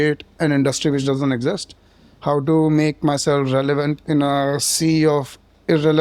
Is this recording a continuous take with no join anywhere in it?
yes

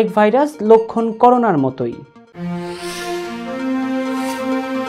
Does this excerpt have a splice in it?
no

